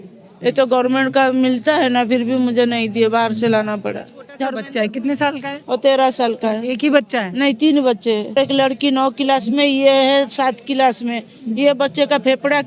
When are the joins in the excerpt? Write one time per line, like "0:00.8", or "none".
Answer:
0:04.6
0:08.3